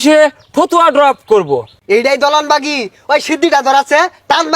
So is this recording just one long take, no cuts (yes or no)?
no